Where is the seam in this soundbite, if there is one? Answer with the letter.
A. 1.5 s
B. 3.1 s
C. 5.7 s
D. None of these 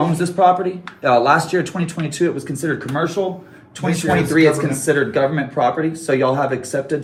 D